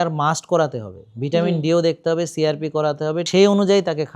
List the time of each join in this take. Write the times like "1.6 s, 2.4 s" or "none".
3.3 s